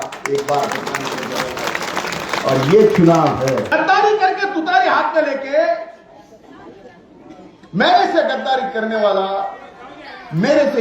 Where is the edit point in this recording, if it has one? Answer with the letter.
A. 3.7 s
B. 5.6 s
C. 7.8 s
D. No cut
A